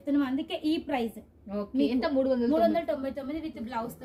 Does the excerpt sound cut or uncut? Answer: uncut